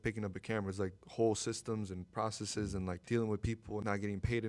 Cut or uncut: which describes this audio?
cut